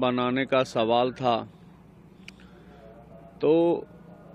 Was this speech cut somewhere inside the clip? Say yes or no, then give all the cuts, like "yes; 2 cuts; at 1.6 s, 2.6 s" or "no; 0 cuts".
no; 0 cuts